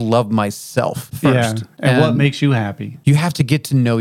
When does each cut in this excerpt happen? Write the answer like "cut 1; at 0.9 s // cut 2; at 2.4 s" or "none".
cut 1; at 1.1 s // cut 2; at 2.9 s